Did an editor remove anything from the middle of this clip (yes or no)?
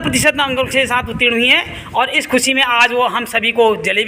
no